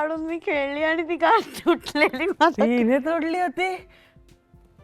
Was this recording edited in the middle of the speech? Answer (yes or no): no